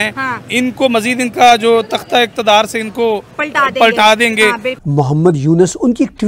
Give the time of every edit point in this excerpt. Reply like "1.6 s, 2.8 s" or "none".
3.3 s, 4.7 s